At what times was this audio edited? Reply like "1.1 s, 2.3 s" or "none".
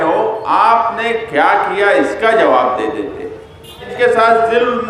3.9 s